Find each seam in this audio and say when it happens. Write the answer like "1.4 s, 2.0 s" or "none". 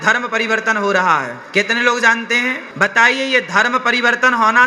1.4 s, 2.7 s